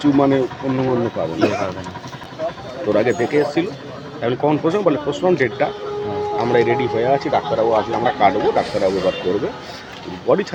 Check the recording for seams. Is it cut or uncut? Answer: uncut